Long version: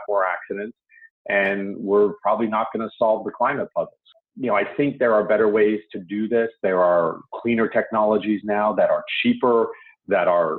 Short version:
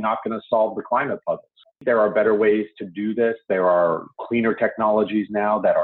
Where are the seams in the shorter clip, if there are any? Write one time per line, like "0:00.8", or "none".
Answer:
0:01.8